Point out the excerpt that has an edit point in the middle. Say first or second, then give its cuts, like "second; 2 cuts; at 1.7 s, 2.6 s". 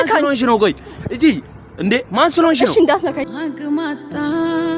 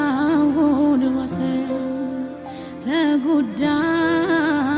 first; 1 cut; at 3.2 s